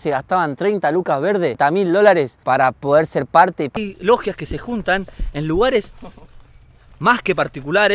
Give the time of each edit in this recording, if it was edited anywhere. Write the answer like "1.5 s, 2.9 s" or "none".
1.6 s, 2.4 s, 3.8 s